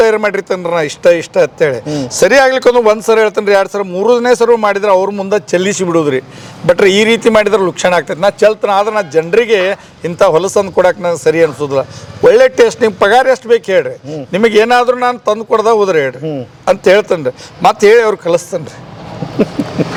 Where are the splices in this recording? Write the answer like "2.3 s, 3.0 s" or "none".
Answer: none